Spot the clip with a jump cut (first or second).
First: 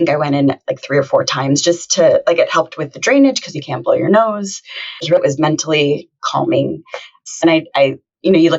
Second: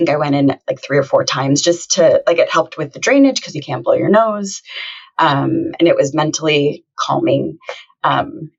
first